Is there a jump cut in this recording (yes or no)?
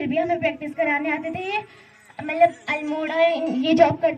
no